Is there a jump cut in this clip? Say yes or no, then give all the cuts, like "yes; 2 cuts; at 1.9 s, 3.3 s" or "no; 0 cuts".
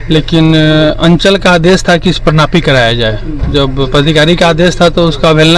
no; 0 cuts